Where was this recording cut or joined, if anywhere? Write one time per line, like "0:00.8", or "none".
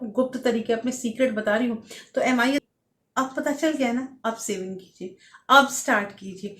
0:02.7

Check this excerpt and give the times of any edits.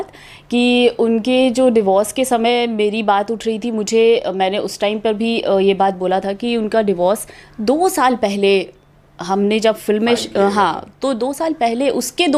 none

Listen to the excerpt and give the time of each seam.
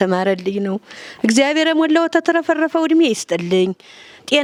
none

